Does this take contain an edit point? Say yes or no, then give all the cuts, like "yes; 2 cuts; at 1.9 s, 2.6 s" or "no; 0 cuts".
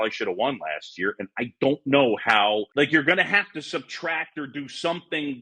yes; 1 cut; at 2.7 s